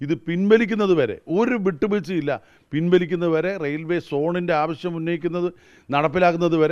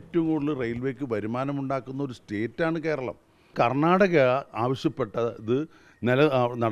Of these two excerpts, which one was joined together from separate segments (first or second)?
second